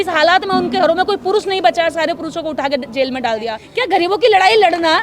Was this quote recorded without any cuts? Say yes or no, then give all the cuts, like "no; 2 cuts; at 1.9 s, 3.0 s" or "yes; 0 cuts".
no; 1 cut; at 3.6 s